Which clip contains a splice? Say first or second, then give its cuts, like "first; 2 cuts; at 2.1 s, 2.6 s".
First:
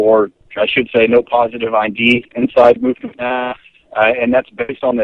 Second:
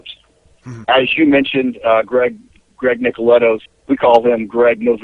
first; 1 cut; at 3.6 s